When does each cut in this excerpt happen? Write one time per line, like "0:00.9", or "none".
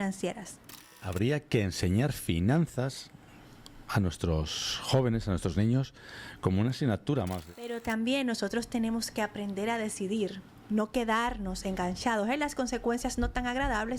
0:01.0
0:07.5